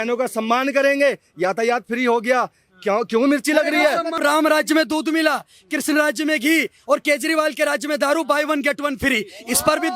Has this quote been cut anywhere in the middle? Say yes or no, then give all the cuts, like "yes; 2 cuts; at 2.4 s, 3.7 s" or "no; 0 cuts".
yes; 1 cut; at 4.2 s